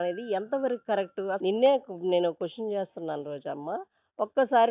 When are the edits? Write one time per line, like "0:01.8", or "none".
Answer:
0:01.4